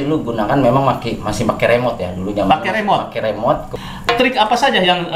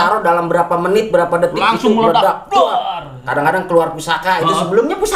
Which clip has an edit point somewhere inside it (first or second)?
first